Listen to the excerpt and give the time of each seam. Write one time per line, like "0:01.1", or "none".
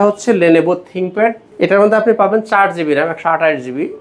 0:01.4